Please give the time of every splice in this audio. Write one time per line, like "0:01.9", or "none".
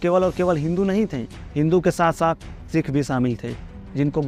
none